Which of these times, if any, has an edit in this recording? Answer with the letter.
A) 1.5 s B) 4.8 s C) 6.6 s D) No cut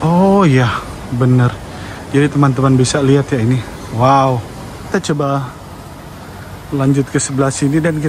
B